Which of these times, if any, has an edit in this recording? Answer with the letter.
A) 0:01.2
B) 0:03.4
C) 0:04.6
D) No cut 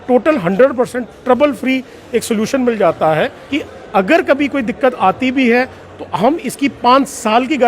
B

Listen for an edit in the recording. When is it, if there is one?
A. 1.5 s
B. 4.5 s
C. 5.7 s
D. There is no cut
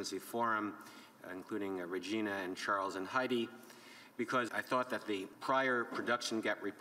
B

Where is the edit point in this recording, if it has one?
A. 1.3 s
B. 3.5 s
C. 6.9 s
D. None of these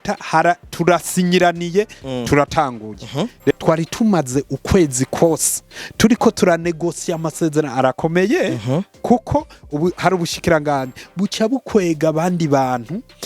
B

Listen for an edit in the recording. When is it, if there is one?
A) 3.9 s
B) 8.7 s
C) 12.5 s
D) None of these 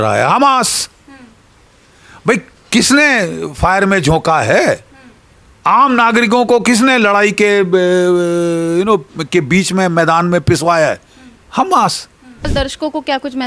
C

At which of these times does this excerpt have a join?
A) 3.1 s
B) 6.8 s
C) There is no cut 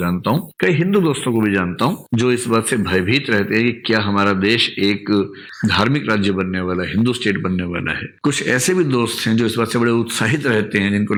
C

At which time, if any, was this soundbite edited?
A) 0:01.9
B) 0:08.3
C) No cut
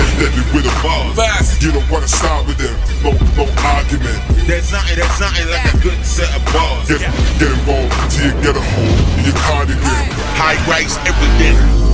C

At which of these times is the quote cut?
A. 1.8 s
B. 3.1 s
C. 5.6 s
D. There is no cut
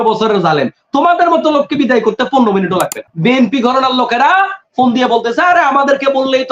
B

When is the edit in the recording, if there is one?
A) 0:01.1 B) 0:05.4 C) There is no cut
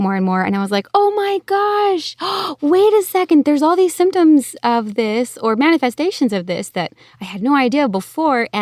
C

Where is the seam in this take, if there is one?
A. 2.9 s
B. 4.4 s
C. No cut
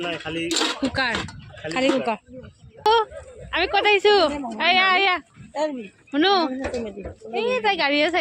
A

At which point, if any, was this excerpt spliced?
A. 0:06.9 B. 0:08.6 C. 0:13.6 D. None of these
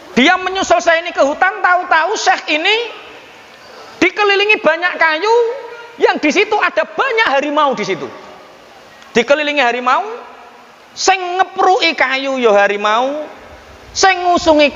D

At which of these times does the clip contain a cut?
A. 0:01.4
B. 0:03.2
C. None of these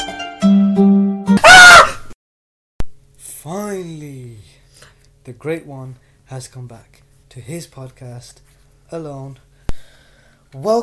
A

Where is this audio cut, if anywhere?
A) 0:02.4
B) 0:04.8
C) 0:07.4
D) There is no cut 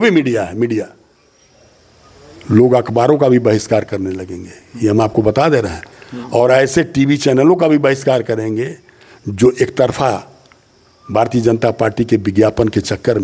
D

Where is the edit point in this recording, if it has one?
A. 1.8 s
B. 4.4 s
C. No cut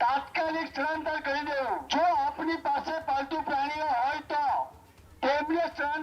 A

